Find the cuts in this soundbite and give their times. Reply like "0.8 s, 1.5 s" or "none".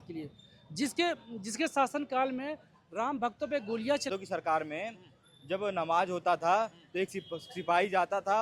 4.1 s

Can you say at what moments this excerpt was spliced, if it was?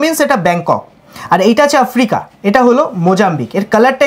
none

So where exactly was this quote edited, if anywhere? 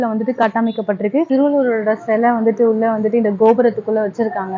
1.3 s

